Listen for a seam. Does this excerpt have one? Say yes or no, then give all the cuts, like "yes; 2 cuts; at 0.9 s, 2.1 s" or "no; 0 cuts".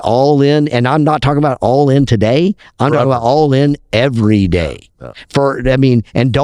no; 0 cuts